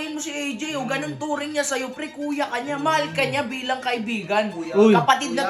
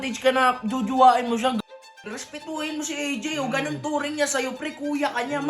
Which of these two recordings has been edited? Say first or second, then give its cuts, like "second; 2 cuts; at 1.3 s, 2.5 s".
second; 1 cut; at 1.6 s